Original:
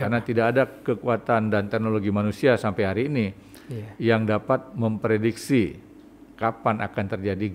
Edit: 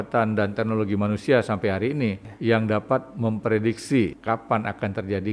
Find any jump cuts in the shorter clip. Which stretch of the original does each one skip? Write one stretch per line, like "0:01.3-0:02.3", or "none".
0:03.4-0:03.9
0:05.8-0:06.3